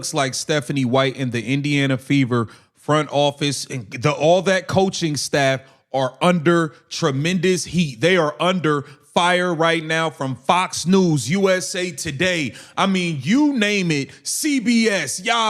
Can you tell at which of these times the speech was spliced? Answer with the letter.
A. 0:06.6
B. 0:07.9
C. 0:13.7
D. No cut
C